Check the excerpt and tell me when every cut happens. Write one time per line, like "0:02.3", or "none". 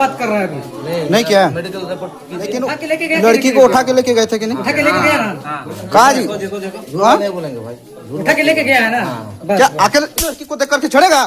0:02.5